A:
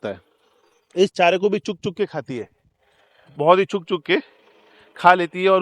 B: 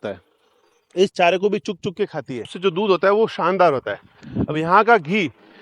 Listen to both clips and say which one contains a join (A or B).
B